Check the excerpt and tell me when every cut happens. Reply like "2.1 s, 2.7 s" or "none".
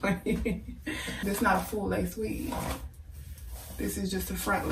1.1 s